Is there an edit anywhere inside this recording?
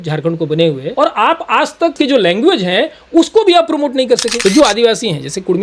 yes; 3 cuts; at 0.9 s, 1.9 s, 4.3 s

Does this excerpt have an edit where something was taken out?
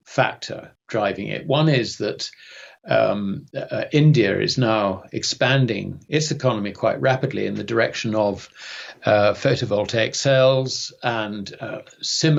no; 0 cuts

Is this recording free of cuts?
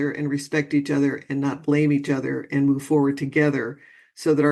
yes; 0 cuts

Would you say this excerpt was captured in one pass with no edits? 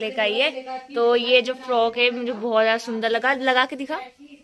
yes; 0 cuts

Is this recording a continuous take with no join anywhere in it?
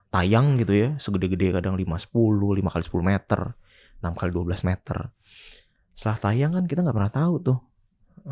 yes; 0 cuts

